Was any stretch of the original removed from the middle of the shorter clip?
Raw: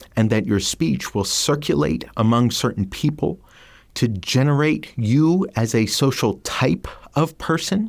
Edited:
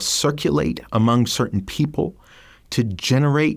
no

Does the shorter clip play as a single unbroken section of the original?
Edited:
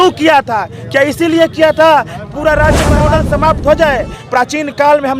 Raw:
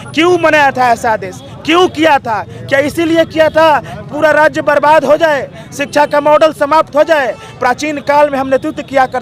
no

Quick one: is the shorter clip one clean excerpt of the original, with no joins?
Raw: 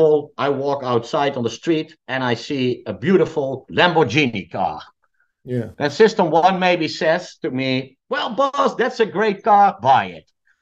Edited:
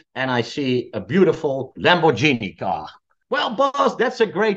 no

